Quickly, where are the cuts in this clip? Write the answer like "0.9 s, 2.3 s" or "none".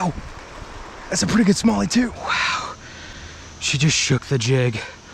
2.2 s